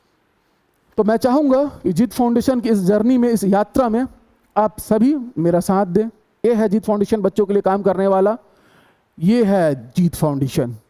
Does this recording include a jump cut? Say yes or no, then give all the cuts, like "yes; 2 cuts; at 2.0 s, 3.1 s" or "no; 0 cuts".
yes; 1 cut; at 6.4 s